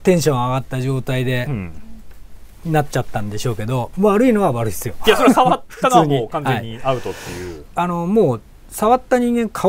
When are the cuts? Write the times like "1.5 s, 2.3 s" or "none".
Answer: 7.6 s